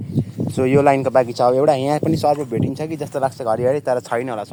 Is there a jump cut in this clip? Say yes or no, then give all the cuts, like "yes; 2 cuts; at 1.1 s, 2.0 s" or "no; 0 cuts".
no; 0 cuts